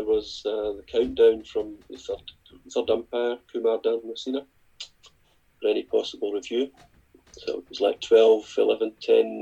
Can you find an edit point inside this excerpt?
no; 0 cuts

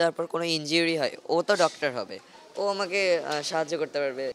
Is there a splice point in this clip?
no; 0 cuts

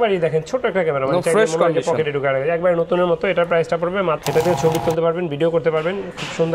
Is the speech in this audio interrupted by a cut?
yes; 1 cut; at 4.2 s

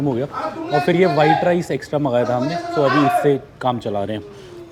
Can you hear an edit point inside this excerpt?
no; 0 cuts

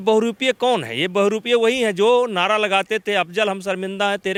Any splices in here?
no; 0 cuts

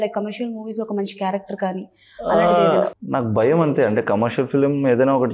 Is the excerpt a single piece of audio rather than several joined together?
no; 1 cut; at 3.0 s

